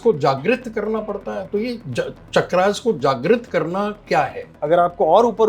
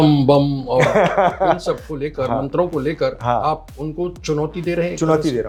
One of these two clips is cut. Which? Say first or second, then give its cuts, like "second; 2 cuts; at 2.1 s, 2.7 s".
first; 1 cut; at 4.6 s